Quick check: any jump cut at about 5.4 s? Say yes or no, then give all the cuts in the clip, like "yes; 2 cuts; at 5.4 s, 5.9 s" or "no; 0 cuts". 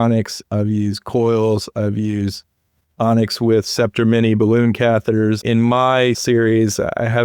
yes; 2 cuts; at 5.4 s, 6.2 s